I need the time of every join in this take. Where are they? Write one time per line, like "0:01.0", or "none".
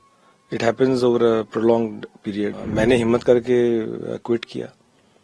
0:02.5